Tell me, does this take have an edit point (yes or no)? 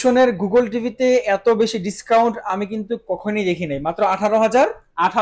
no